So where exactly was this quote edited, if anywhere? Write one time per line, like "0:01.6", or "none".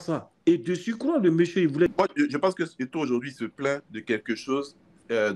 0:01.9